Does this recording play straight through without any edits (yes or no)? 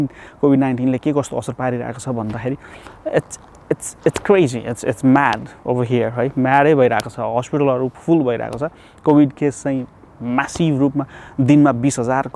yes